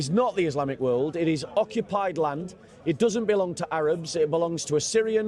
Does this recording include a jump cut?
no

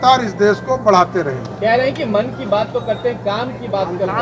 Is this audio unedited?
yes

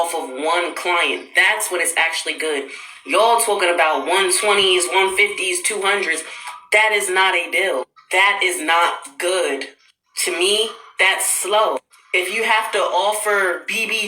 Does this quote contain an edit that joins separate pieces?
yes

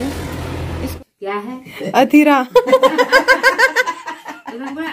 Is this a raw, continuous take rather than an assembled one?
no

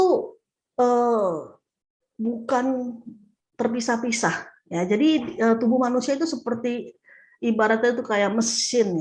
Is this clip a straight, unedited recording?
yes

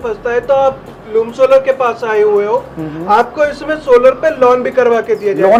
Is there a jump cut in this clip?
no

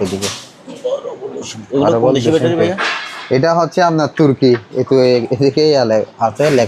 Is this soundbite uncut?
yes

